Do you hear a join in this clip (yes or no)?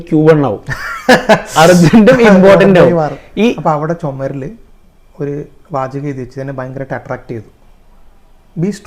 yes